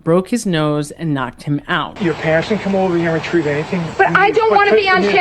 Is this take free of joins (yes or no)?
no